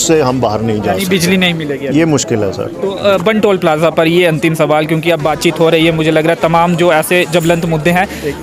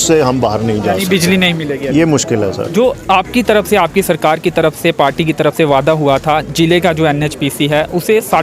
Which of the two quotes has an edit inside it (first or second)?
second